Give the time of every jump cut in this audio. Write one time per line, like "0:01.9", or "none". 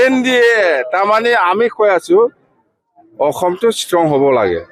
none

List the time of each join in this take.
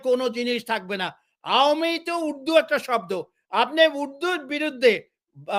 none

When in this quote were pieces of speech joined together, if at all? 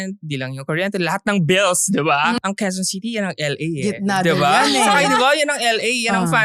0:02.3

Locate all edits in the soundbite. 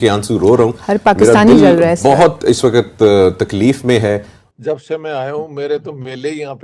0:04.4

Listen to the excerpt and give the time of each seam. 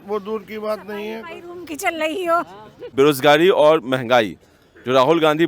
0:02.9

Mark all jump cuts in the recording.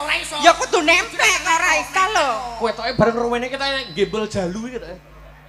none

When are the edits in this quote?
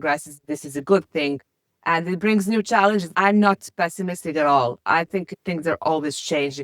0:03.1
0:05.4

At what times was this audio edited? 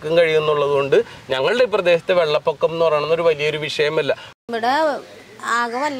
0:04.3

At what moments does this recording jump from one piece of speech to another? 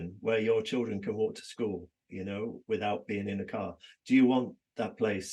none

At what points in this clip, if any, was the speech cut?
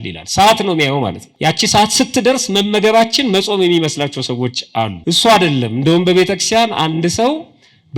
0:01.2
0:05.0

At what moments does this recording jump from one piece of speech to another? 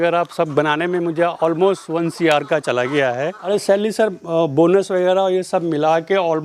0:03.5

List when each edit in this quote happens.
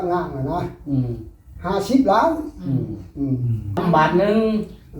0:03.8

